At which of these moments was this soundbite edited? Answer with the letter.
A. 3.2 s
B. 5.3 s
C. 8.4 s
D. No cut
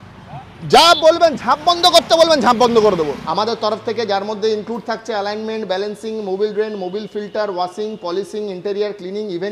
A